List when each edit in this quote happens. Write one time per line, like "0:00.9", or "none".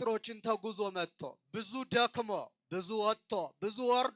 none